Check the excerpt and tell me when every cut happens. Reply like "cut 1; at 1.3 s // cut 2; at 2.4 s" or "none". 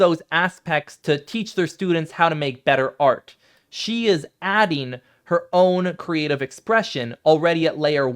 cut 1; at 0.9 s